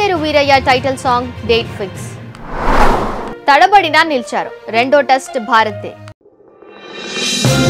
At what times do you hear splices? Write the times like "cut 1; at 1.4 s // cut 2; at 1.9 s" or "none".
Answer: cut 1; at 6.0 s

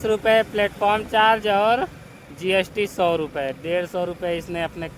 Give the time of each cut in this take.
none

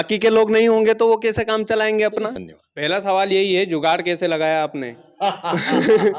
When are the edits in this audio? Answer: cut 1; at 2.4 s

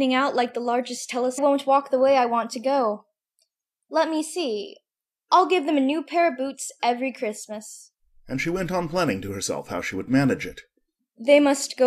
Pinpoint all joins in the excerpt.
none

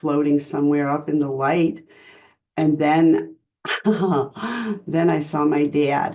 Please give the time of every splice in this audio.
none

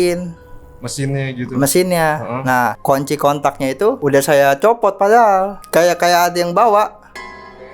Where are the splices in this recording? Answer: cut 1; at 2.8 s // cut 2; at 4.0 s // cut 3; at 5.6 s

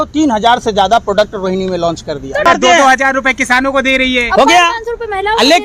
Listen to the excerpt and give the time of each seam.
cut 1; at 2.5 s

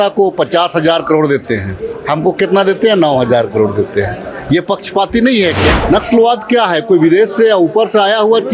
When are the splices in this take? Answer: cut 1; at 5.8 s

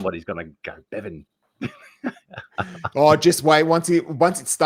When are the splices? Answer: none

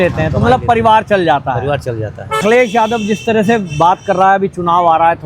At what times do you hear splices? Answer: cut 1; at 2.4 s

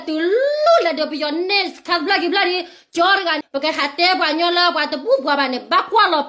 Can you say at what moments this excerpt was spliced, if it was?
cut 1; at 3.4 s

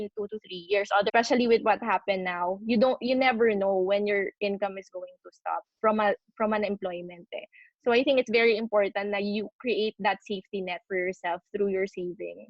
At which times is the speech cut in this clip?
cut 1; at 1.1 s

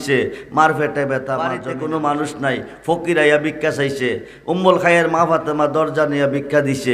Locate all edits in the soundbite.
cut 1; at 1.6 s

